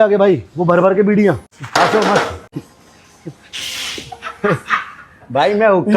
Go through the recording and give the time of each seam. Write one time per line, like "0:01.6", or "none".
0:01.5
0:02.5